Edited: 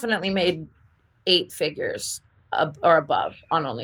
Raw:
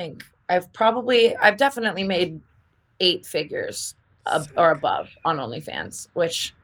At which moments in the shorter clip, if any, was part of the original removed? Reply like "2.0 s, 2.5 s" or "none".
none